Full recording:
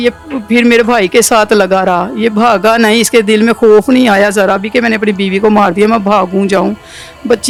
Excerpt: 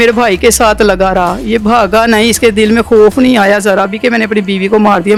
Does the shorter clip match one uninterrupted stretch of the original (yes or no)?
yes